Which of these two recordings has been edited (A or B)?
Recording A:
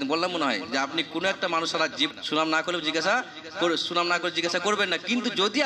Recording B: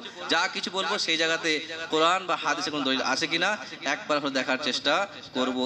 A